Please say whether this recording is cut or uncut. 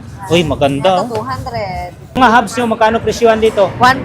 cut